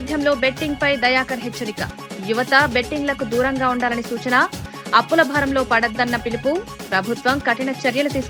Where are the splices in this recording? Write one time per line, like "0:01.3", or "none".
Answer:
none